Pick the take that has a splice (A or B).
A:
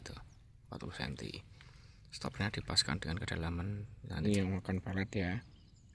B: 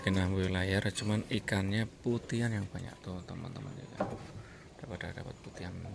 A